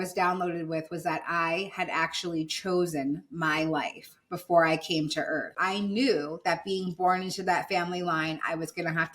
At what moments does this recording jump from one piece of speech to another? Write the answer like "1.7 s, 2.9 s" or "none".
5.5 s